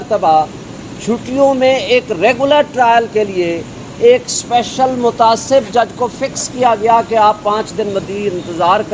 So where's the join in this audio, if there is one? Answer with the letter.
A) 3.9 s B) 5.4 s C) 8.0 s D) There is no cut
D